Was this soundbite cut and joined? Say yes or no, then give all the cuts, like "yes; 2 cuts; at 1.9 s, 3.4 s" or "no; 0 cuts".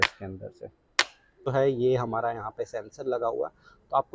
yes; 1 cut; at 1.5 s